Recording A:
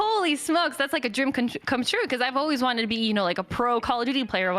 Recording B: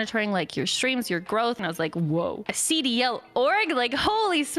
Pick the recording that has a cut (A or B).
B